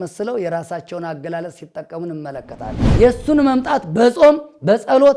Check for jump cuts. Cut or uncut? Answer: cut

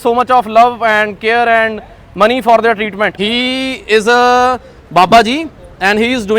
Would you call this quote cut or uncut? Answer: cut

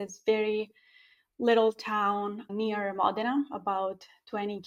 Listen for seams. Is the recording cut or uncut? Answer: uncut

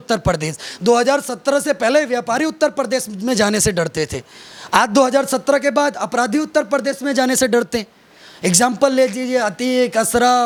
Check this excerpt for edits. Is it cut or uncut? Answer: uncut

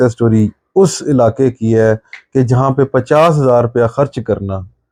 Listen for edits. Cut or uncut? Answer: uncut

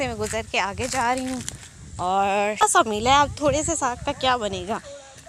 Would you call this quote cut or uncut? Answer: uncut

